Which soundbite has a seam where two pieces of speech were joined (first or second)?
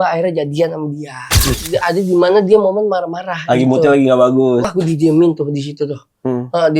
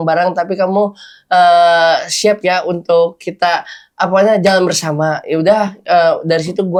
first